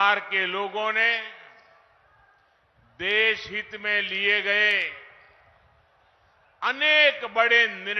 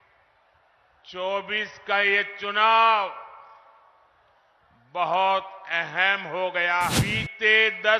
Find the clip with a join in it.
second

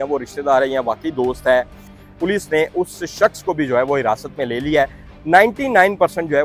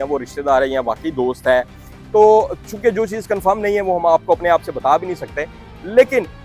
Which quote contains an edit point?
first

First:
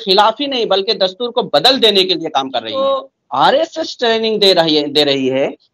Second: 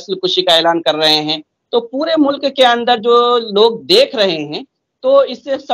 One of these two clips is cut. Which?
first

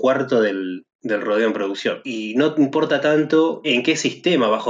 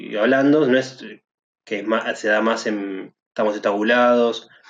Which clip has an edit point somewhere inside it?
first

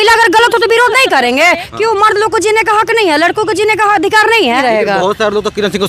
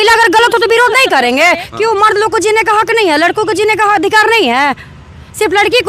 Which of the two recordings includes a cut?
first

